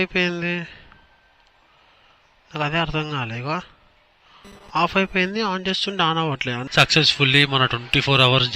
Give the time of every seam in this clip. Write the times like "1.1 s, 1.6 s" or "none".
6.6 s